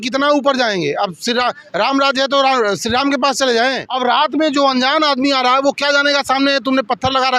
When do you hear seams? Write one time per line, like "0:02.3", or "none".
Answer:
0:03.9